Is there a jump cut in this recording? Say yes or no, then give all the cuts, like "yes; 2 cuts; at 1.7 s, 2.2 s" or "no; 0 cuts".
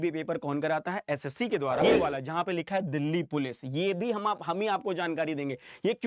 yes; 1 cut; at 1.8 s